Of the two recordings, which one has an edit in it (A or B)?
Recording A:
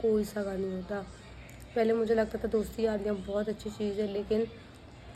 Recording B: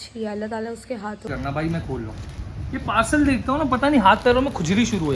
B